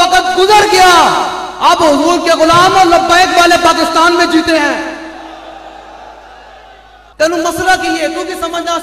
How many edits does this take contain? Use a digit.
1